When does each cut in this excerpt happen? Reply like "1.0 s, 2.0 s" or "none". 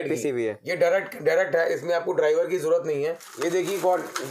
3.3 s